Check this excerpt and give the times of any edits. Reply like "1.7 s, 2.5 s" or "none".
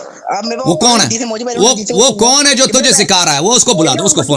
none